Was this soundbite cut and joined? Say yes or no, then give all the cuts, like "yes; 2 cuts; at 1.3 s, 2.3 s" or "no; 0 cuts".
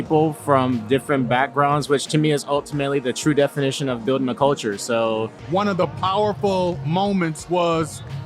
yes; 1 cut; at 5.4 s